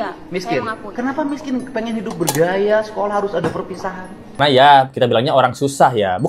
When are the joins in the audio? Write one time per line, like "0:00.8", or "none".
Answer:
0:04.3

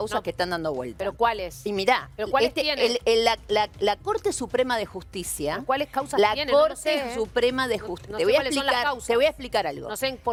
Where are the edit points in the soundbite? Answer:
none

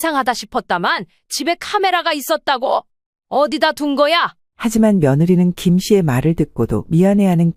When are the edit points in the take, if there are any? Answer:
0:04.4

